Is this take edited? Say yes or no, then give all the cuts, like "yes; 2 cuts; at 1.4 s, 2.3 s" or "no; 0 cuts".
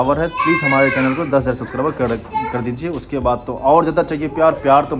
no; 0 cuts